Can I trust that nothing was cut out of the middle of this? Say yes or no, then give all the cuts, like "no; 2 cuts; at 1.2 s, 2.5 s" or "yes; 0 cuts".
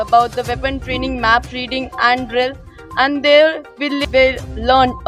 yes; 0 cuts